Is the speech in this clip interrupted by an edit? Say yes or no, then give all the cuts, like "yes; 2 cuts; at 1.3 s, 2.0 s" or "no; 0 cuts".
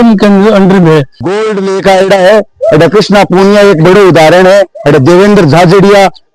yes; 1 cut; at 1.2 s